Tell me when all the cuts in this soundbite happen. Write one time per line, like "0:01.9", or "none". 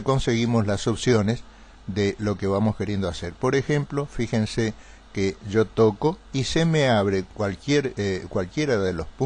0:07.8

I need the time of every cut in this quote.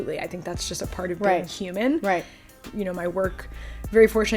0:02.6

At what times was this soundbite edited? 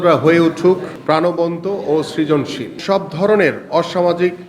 0:00.9
0:02.8

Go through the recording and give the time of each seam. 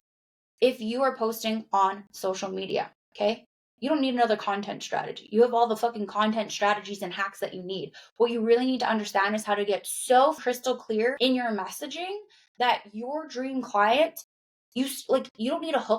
0:10.8

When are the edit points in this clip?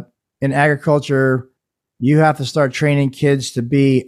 none

